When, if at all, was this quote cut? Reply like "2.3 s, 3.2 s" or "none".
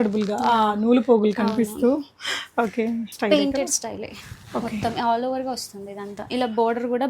3.1 s